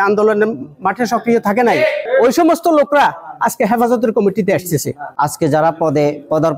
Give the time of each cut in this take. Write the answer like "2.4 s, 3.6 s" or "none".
2.0 s, 5.1 s